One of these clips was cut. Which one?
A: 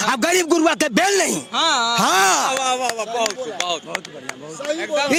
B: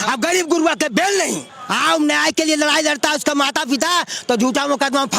B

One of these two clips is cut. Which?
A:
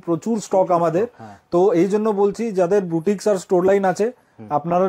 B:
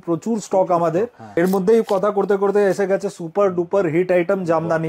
B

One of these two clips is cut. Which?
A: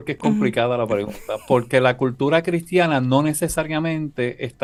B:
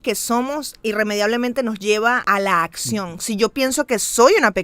B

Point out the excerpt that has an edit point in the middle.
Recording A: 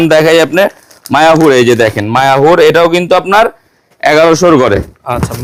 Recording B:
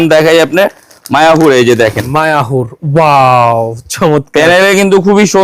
B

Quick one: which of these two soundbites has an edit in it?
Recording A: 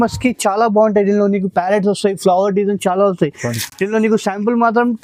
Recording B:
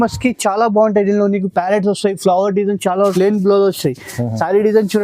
B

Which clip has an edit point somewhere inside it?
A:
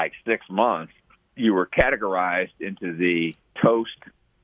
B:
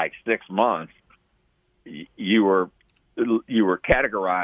A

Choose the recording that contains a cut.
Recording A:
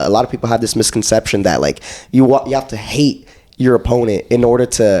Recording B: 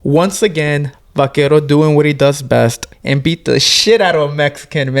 B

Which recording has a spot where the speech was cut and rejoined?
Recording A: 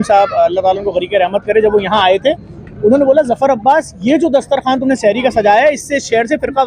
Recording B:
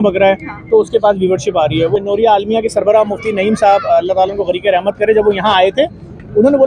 B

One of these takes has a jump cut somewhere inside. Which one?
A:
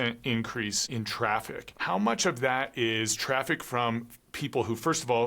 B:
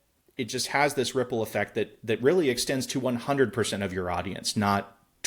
A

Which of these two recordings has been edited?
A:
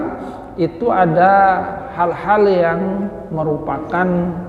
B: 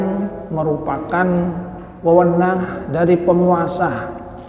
B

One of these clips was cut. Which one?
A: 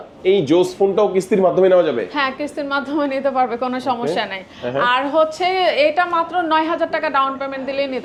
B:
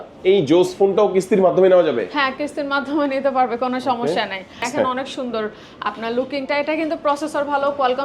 B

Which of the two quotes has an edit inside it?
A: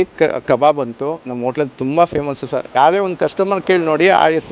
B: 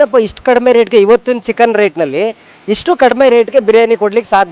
A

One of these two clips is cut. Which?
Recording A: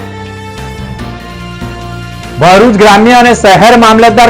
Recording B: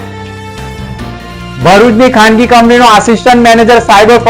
B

